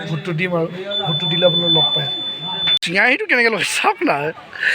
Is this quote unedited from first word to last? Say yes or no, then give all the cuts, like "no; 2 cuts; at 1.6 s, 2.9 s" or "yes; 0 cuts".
no; 1 cut; at 2.8 s